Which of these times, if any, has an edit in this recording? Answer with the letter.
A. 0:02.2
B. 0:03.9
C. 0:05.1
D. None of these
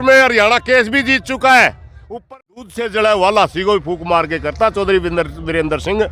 A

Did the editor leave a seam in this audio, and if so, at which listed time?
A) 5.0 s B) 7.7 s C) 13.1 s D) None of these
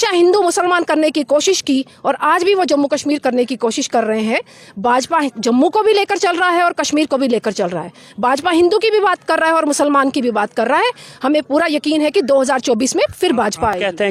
D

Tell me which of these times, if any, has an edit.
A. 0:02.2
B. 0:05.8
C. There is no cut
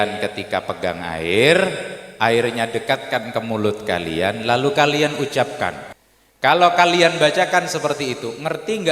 B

